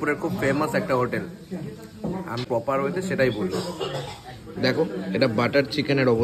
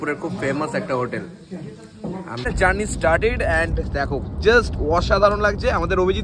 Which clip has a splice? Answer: second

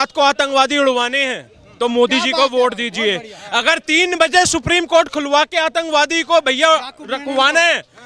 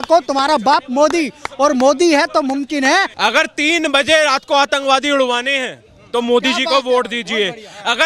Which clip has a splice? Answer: second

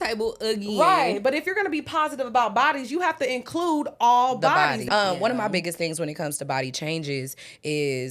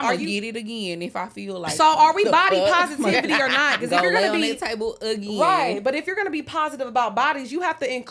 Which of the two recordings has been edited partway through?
first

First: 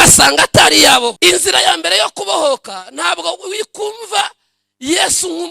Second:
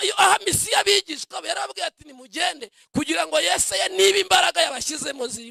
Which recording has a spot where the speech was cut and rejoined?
first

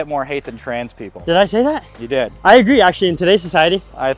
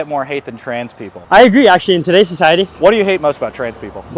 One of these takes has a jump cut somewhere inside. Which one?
second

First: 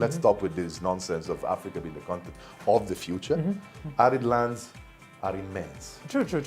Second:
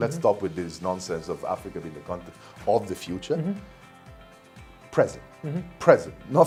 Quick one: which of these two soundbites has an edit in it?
first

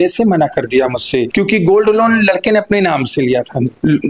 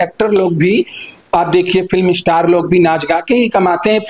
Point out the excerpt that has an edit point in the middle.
first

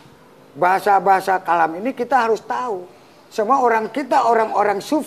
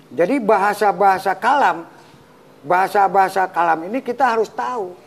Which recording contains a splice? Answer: second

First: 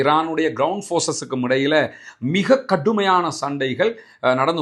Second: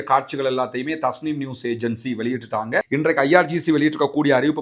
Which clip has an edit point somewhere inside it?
second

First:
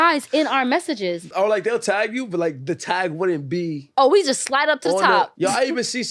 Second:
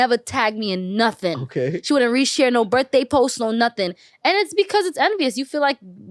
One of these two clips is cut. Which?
first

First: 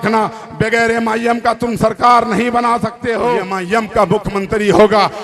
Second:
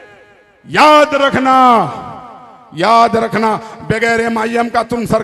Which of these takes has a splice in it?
first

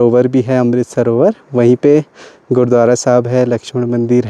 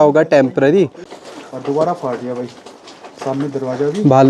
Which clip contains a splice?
second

